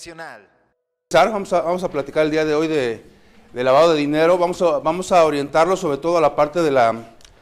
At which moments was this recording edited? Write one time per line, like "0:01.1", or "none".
0:01.1